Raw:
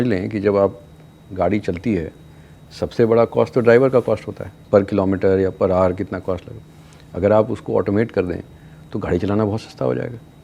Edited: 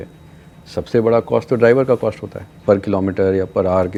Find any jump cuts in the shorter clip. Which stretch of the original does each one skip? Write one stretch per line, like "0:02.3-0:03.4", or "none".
none